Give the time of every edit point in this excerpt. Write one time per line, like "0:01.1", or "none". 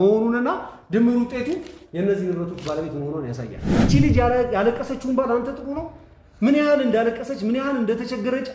0:03.7